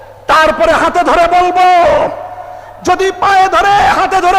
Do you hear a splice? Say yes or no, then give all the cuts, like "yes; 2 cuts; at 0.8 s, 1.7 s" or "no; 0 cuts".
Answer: no; 0 cuts